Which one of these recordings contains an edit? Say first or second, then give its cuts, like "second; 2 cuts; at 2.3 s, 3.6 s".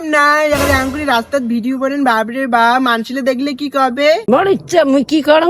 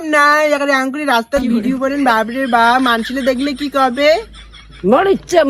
first; 1 cut; at 4.2 s